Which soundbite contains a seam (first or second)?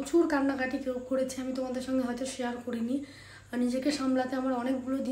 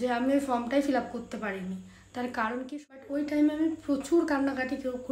second